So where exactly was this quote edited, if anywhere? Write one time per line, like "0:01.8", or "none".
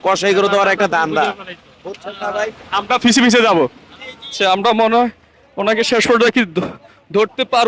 0:04.3